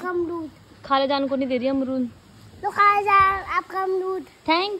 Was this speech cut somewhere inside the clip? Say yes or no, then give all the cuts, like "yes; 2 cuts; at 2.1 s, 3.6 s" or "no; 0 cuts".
no; 0 cuts